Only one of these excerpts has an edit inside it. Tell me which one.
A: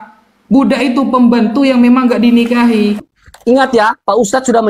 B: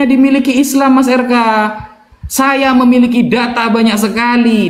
A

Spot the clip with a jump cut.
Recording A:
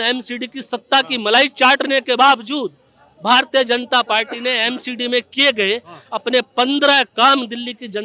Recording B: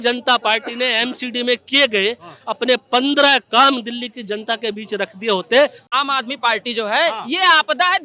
B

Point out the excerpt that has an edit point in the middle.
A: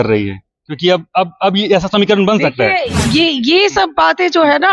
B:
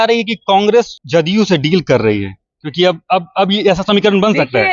B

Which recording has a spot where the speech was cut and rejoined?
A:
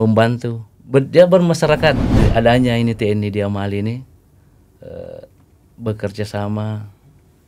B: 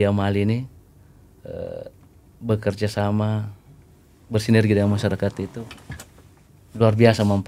A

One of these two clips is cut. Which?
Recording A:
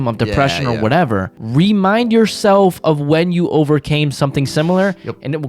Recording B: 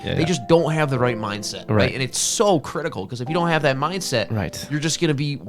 A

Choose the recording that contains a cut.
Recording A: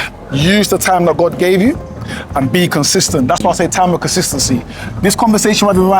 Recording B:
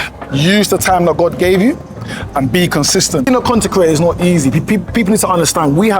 B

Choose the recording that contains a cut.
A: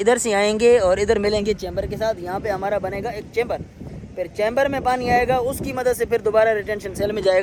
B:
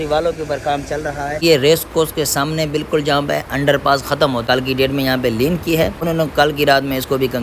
B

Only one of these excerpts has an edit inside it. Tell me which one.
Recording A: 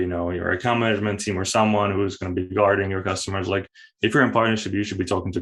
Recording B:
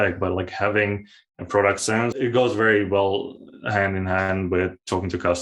B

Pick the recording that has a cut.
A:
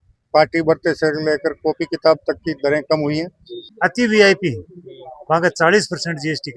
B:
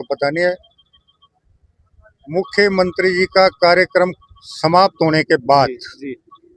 A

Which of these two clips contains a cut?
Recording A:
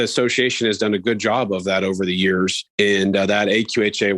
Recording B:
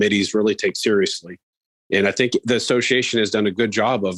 A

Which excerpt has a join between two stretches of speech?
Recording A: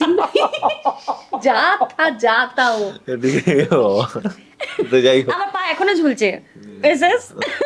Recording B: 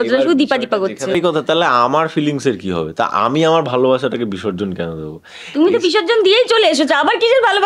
B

